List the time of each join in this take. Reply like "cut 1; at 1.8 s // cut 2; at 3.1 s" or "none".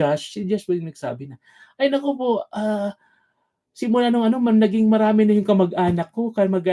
none